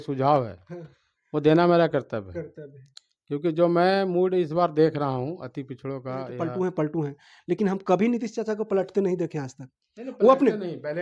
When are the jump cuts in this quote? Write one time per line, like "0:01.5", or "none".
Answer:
0:06.4